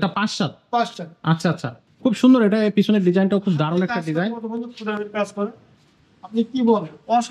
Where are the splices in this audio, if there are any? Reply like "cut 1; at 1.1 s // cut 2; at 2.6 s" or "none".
cut 1; at 1.7 s